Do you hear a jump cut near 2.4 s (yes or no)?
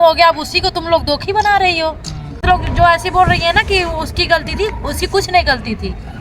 yes